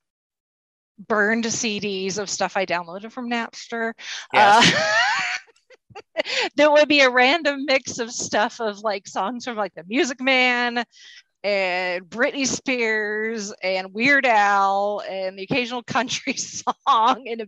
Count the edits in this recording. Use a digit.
0